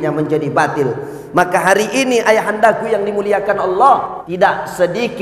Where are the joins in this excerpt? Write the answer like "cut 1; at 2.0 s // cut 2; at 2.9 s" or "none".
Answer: cut 1; at 4.2 s